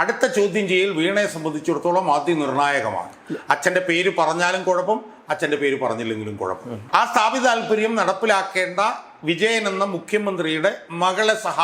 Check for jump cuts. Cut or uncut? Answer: cut